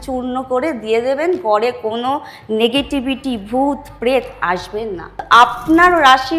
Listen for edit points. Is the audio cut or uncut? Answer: cut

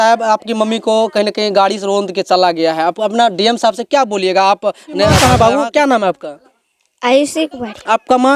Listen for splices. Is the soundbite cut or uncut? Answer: cut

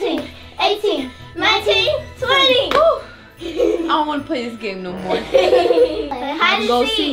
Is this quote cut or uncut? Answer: cut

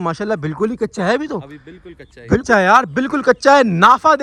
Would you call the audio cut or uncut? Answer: uncut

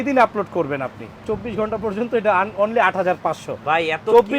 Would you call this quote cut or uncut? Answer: cut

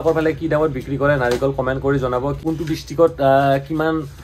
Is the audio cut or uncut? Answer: cut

